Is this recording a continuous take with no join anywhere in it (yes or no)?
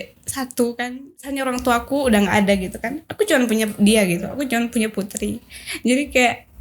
no